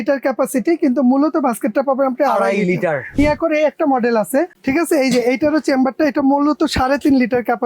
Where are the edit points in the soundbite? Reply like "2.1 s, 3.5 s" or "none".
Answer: 3.2 s, 4.6 s